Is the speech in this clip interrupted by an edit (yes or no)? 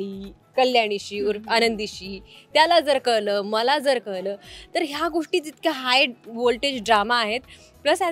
no